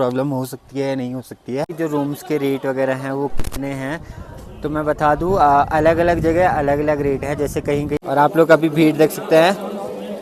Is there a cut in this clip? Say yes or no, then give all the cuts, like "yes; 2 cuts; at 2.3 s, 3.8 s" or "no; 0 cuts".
yes; 2 cuts; at 1.7 s, 8.0 s